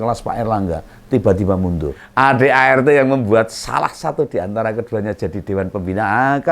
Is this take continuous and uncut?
no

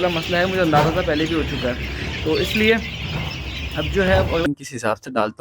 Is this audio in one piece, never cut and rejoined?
no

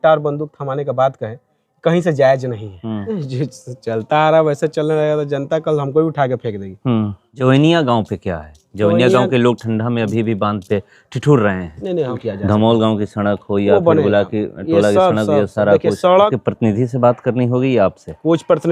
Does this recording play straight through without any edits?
no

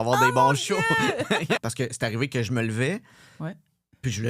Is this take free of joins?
no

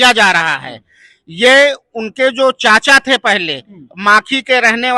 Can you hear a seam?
no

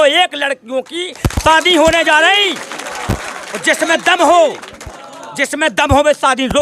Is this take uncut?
yes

